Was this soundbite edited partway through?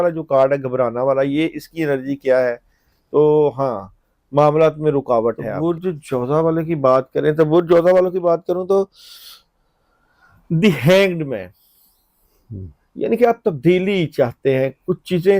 yes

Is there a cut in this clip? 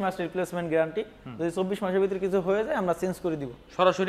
no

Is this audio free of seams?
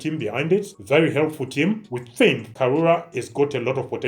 no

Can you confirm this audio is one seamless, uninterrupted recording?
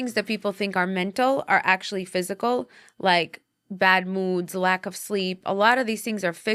yes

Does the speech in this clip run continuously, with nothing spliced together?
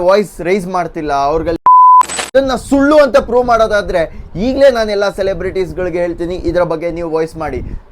no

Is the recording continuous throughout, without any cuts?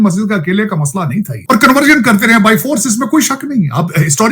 no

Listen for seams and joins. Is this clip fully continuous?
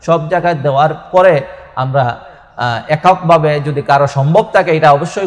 yes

